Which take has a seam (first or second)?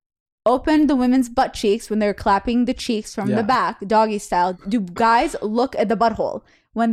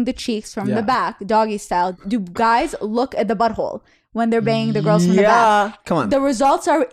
second